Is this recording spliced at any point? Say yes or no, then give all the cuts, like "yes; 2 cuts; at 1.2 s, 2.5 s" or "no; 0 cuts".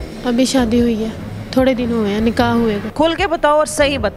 yes; 1 cut; at 2.9 s